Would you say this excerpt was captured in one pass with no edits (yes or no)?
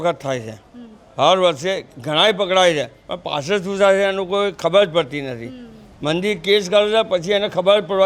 yes